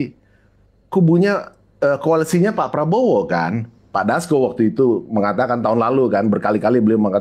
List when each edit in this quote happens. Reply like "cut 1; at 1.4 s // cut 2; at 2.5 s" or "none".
cut 1; at 3.9 s